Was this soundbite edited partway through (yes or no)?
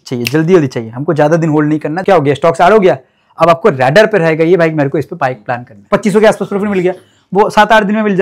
yes